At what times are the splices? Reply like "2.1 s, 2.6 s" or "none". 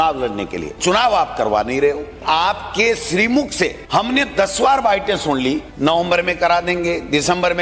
0.8 s, 2.2 s, 3.8 s, 5.7 s